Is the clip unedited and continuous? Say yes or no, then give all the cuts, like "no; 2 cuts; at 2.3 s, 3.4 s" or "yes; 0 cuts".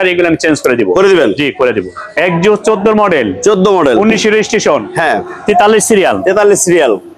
no; 1 cut; at 2.1 s